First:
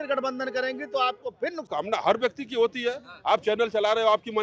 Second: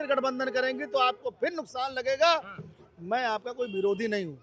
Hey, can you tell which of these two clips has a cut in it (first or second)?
first